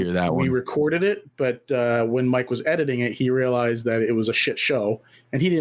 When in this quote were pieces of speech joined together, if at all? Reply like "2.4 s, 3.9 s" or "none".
none